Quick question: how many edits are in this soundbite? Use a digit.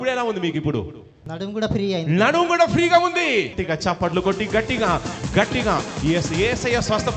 2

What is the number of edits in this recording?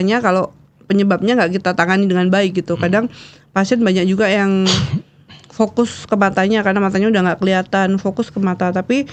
0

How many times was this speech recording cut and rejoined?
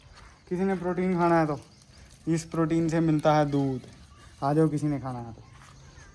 0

